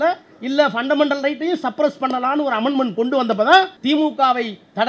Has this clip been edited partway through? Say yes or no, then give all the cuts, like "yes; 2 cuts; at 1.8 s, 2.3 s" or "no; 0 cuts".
yes; 1 cut; at 3.8 s